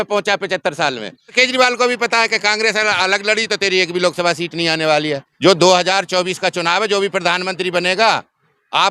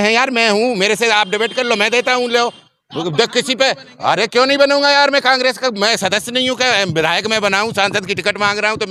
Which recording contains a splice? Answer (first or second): first